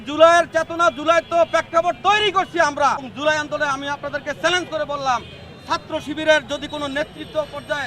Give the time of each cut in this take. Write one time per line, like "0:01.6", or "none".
0:03.1